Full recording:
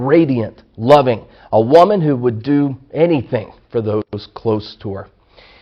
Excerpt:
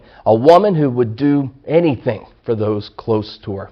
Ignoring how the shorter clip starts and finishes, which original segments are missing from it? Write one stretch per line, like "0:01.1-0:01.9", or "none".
0:04.1-0:04.2